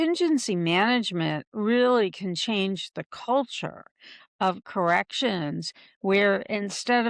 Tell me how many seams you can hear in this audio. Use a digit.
0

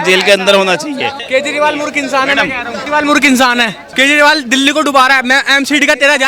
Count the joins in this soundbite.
3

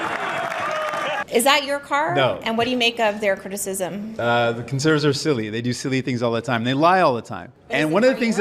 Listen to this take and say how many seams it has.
1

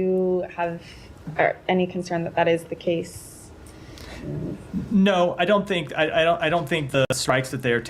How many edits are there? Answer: 1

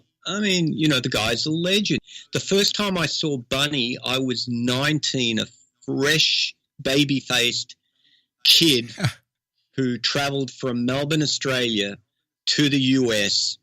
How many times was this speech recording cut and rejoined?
1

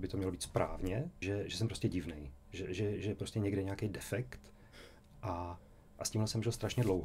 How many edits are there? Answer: 1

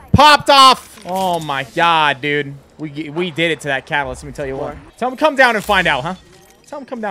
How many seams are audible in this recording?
1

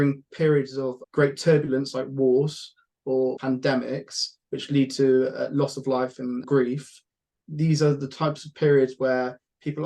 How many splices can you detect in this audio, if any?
3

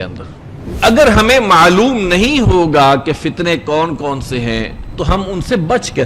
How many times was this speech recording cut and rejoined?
2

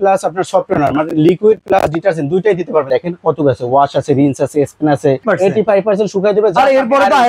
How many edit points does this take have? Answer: 2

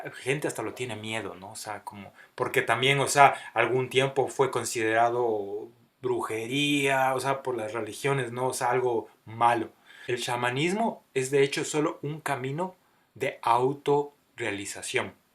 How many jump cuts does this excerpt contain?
1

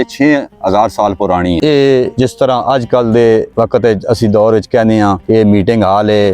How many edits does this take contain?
3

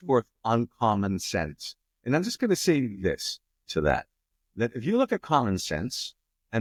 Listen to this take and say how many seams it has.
0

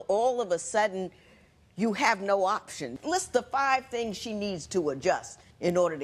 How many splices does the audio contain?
1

